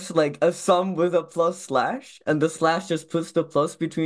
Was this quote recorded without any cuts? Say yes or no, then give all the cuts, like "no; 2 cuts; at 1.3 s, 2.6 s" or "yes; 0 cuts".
yes; 0 cuts